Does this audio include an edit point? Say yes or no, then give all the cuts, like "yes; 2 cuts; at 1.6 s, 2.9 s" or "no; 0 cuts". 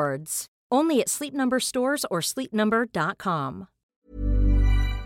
yes; 1 cut; at 4.0 s